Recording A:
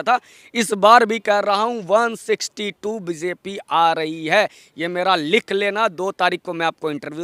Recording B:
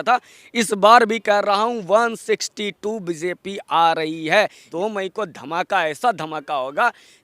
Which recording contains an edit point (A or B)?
B